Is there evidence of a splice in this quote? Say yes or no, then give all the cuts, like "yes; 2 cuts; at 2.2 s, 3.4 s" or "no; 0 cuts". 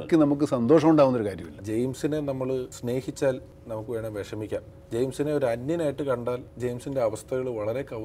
yes; 4 cuts; at 1.6 s, 2.7 s, 3.5 s, 4.7 s